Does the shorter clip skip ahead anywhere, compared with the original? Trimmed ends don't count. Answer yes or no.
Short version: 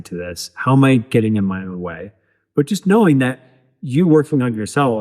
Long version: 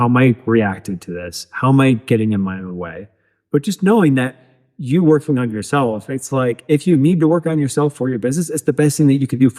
no